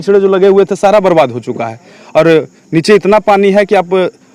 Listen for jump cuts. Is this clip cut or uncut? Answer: uncut